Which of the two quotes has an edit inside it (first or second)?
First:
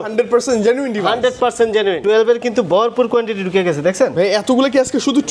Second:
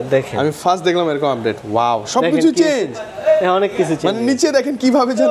first